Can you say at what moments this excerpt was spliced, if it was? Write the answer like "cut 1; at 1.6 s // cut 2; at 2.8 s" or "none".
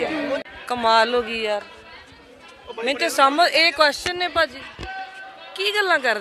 none